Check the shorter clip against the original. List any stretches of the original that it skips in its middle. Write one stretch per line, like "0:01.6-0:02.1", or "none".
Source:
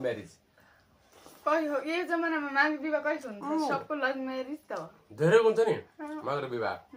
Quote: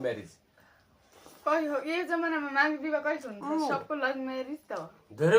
none